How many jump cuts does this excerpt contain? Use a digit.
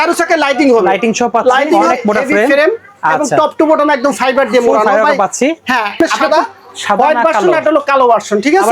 2